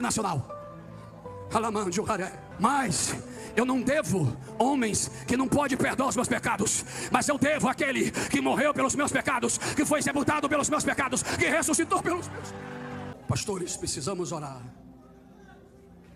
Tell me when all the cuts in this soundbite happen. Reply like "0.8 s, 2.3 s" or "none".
13.1 s